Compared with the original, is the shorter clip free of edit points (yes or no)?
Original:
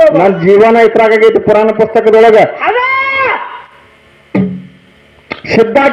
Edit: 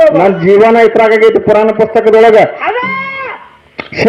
no